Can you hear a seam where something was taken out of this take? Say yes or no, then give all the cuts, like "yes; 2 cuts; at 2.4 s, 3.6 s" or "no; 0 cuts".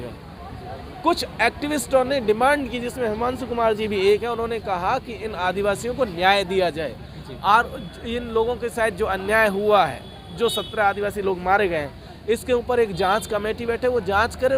no; 0 cuts